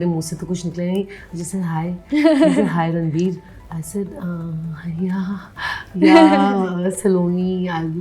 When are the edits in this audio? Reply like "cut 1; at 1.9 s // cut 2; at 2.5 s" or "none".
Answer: none